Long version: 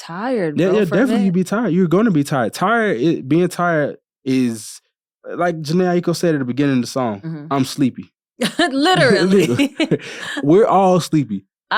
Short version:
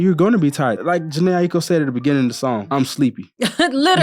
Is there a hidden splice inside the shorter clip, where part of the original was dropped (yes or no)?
yes